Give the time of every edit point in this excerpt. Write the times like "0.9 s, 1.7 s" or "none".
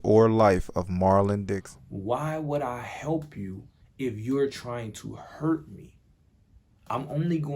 1.7 s